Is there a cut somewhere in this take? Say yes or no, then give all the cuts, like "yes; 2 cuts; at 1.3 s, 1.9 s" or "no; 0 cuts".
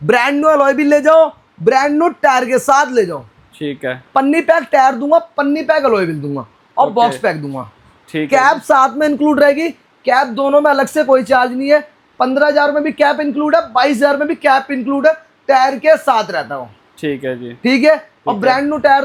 no; 0 cuts